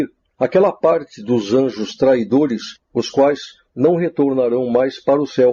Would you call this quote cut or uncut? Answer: uncut